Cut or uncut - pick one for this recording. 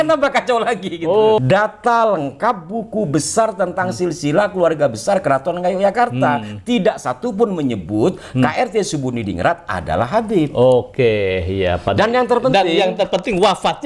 cut